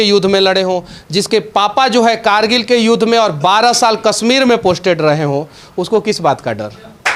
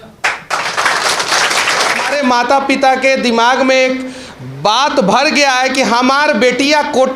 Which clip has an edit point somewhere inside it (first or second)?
second